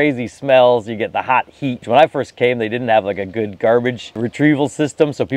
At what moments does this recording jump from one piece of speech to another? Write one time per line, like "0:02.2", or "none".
0:01.8
0:04.2